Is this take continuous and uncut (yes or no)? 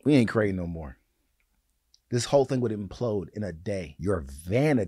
no